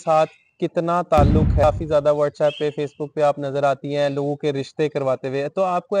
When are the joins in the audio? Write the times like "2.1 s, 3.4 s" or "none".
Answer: 1.6 s